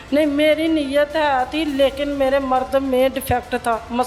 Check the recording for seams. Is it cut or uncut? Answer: uncut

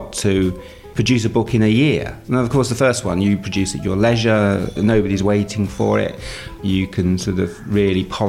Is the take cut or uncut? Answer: cut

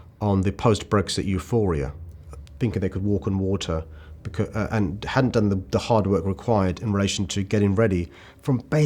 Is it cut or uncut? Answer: uncut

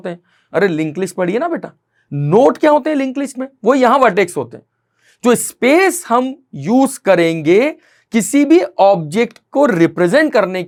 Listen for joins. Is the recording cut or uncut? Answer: uncut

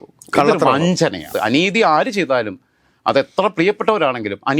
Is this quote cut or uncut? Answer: cut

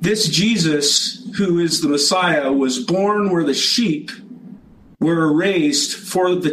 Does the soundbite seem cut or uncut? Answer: cut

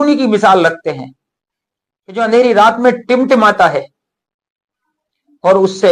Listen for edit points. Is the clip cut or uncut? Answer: uncut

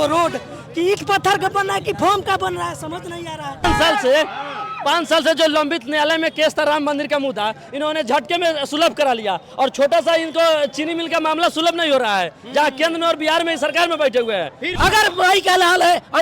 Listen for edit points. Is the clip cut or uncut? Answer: cut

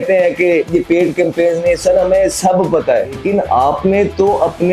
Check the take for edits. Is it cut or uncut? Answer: cut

